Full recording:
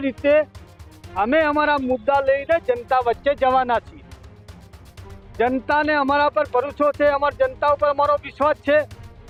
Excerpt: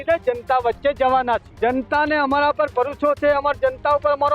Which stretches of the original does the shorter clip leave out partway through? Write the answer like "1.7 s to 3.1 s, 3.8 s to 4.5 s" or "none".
3.9 s to 5.3 s